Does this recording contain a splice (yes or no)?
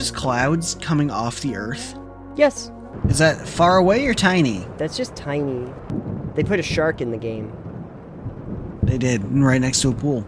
yes